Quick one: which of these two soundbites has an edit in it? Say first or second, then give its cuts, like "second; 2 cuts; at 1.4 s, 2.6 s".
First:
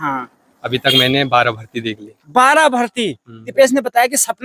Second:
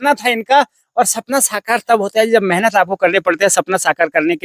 first; 1 cut; at 3.5 s